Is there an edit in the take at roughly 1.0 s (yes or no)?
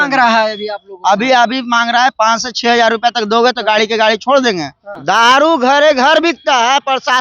no